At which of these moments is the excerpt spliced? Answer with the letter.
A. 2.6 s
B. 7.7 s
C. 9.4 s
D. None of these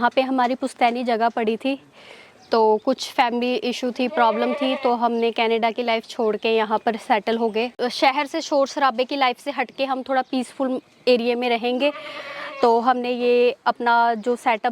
B